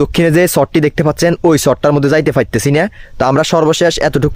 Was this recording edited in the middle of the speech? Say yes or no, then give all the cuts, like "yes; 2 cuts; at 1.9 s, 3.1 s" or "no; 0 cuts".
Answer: no; 0 cuts